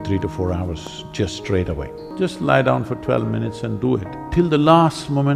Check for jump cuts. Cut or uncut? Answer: cut